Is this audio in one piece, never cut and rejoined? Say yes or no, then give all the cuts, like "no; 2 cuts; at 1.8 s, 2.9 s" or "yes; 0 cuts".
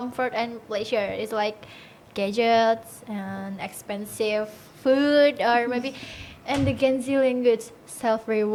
yes; 0 cuts